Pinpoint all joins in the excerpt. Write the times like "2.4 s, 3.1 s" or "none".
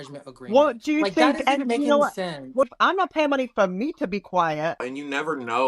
2.7 s, 4.9 s